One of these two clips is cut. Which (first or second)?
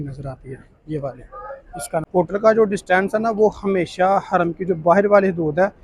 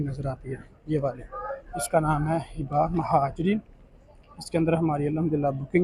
first